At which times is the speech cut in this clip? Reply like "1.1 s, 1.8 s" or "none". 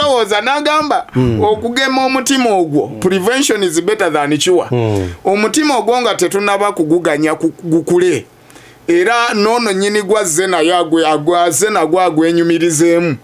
none